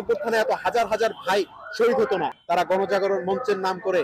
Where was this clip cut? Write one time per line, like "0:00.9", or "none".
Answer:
0:02.4

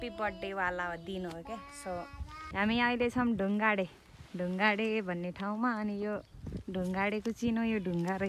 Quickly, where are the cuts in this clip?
0:02.5

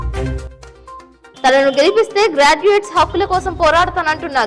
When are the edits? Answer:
none

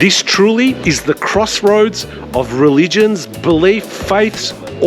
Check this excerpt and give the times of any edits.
0:00.8
0:03.9

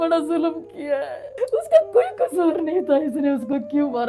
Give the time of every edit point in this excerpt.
0:01.2

